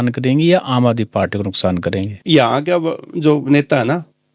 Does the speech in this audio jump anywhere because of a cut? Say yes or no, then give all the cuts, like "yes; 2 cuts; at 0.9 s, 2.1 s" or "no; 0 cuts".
yes; 1 cut; at 2.2 s